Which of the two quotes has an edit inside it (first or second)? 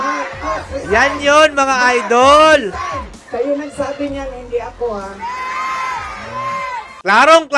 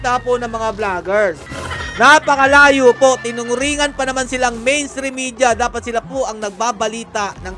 first